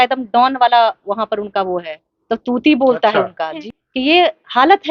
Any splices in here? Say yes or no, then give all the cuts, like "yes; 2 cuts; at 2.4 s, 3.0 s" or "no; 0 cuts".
yes; 1 cut; at 3.6 s